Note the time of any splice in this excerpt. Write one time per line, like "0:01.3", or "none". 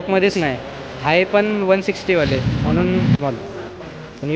0:03.1